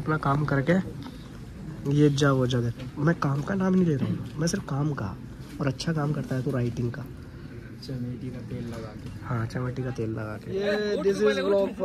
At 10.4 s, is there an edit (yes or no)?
yes